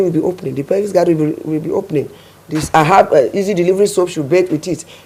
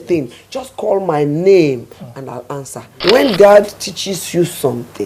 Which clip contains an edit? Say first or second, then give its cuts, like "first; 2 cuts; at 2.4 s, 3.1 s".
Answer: second; 1 cut; at 3.0 s